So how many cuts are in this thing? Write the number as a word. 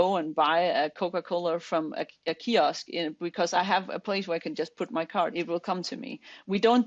two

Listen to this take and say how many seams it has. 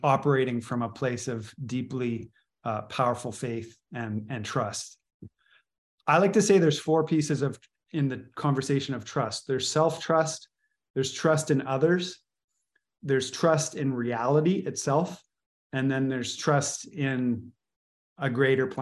zero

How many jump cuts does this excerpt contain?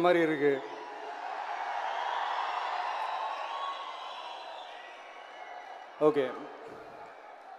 zero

